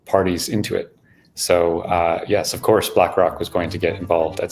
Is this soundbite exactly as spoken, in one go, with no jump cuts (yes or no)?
yes